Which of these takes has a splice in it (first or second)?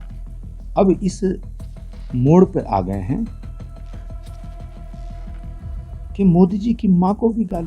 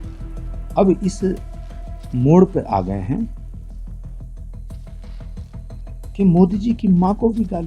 second